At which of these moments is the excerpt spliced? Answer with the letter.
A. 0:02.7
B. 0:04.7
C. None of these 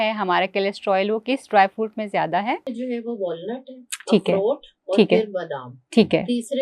A